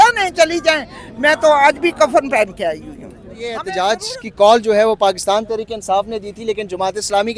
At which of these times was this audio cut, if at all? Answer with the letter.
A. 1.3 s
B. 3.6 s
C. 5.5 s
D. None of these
B